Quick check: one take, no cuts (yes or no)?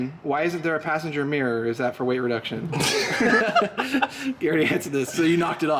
yes